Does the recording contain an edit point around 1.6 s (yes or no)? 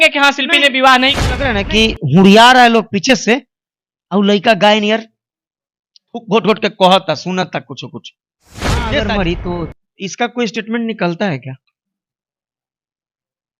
yes